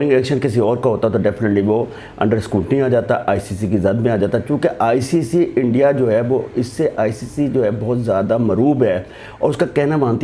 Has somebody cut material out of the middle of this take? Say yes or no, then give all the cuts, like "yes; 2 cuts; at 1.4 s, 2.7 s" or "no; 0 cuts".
no; 0 cuts